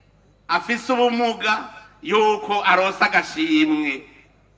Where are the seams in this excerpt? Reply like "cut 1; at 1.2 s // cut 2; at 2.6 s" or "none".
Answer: none